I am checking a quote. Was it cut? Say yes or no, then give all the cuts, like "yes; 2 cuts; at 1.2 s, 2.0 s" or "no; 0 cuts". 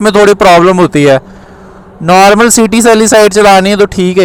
no; 0 cuts